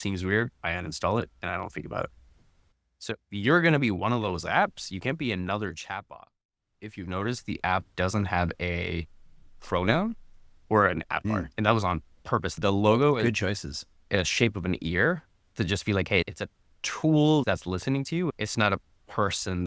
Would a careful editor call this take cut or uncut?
cut